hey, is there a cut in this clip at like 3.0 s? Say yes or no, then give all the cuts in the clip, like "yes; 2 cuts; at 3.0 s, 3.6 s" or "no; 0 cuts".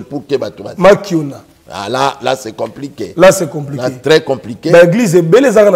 no; 0 cuts